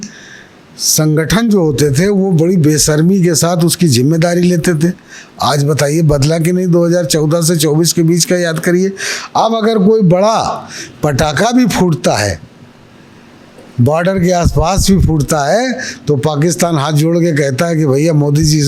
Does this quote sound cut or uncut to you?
uncut